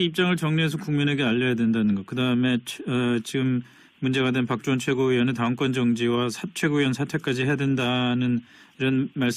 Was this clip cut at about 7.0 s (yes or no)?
yes